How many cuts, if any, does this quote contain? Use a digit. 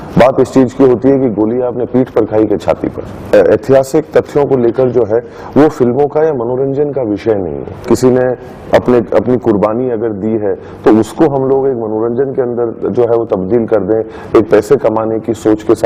2